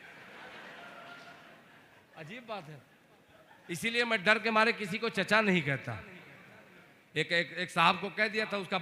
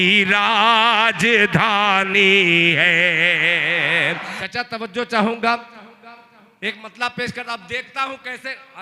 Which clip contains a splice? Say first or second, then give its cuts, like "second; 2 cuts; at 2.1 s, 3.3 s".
second; 1 cut; at 4.3 s